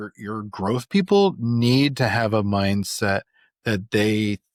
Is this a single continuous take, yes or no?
yes